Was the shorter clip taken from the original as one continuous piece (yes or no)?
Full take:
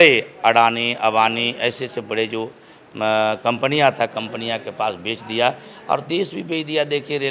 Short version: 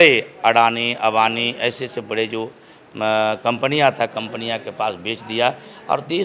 yes